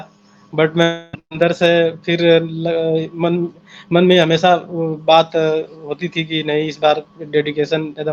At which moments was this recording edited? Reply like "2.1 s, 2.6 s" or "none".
none